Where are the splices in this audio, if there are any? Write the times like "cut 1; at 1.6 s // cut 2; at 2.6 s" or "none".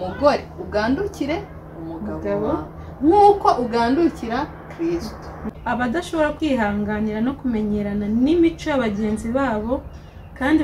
cut 1; at 5.5 s